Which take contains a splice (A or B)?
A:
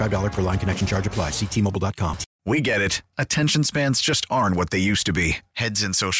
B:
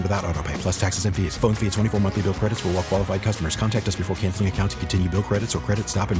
A